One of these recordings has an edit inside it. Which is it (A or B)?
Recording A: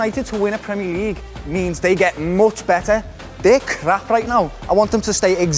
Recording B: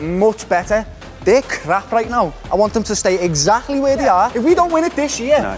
B